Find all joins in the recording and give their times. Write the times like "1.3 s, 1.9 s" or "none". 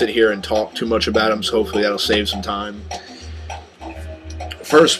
3.6 s